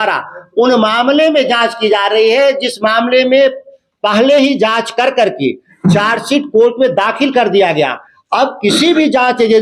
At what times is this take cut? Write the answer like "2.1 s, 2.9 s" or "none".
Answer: none